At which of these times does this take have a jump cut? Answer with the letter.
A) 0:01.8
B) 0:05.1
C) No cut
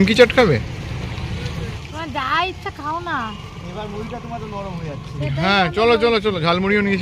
A